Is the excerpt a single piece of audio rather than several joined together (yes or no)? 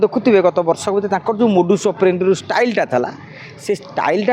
yes